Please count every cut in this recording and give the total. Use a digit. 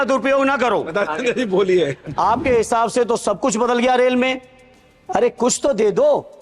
1